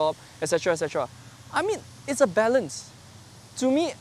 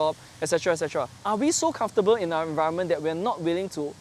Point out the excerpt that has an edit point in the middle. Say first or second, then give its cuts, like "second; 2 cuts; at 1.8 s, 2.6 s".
second; 1 cut; at 1.2 s